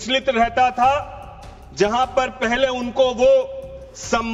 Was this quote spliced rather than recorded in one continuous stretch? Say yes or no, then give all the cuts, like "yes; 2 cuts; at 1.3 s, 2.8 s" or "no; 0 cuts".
no; 0 cuts